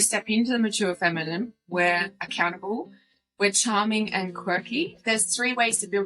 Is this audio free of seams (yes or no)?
no